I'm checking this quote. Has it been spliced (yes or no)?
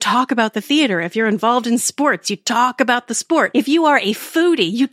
yes